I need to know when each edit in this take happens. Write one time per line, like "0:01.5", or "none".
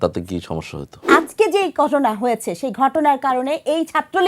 0:01.0